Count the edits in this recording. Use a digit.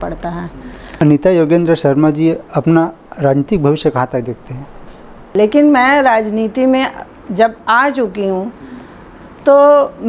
2